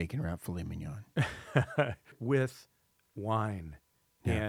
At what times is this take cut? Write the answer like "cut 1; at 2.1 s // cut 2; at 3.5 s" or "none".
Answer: cut 1; at 2.2 s